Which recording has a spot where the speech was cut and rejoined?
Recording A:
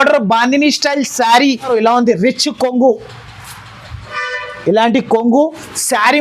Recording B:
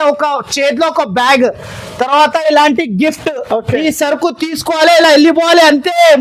A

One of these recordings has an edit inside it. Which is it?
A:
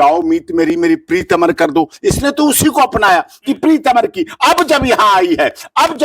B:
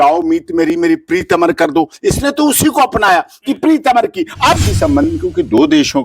B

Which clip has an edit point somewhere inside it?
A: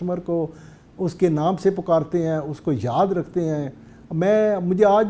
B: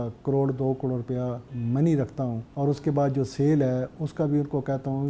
B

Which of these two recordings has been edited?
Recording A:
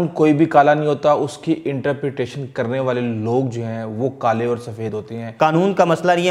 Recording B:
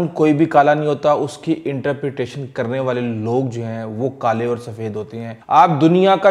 A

